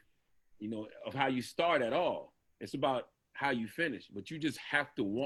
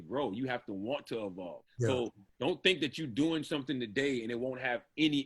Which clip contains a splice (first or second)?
second